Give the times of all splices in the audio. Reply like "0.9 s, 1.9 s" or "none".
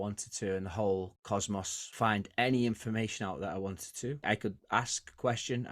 1.8 s, 4.2 s